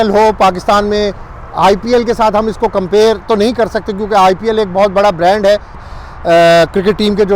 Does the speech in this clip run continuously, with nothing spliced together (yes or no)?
no